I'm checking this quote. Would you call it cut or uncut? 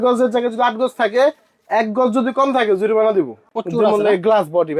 cut